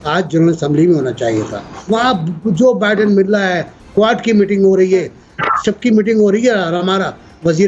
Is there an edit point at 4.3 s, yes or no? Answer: no